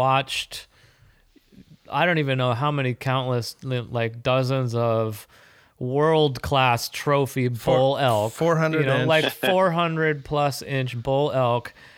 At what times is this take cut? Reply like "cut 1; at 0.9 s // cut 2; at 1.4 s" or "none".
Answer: none